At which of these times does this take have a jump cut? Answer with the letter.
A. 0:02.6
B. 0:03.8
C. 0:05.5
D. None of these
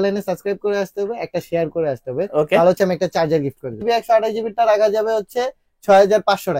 B